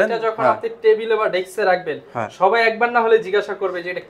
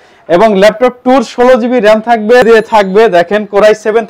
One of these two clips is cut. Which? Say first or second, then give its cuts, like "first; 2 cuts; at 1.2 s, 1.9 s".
second; 1 cut; at 2.4 s